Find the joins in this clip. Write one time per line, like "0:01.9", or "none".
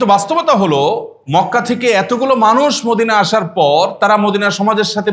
none